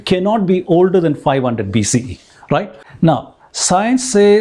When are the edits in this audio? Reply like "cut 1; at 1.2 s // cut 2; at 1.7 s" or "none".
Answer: cut 1; at 2.8 s